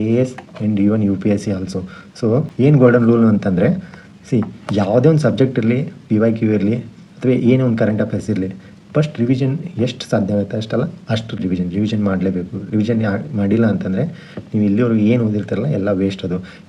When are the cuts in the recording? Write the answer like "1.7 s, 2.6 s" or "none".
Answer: none